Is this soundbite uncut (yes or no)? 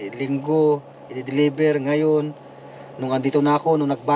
yes